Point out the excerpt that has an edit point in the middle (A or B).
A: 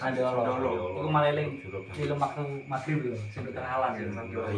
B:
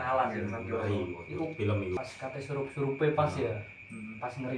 B